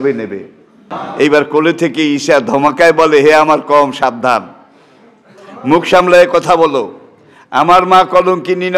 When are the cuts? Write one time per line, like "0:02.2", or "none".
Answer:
0:01.0

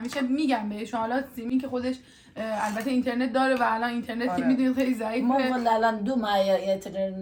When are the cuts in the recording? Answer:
none

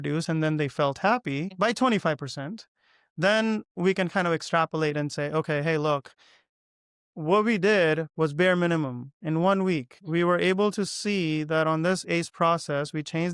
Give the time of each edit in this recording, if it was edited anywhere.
0:01.5
0:09.9

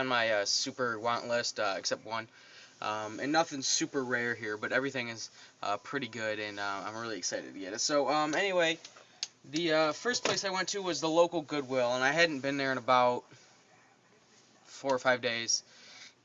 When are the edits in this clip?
none

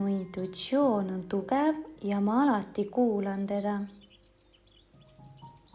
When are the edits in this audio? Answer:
none

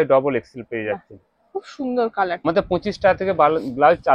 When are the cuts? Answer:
0:02.4

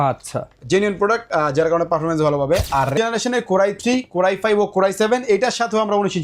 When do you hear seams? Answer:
0:02.9

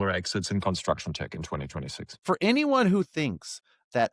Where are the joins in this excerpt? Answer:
0:02.2

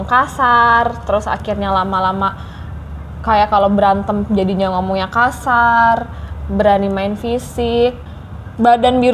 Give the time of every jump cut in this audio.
0:08.0

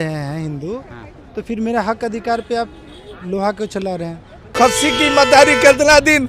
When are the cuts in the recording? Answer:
0:04.5

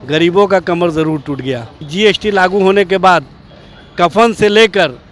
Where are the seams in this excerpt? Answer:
0:01.8

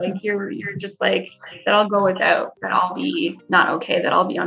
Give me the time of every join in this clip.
0:03.4

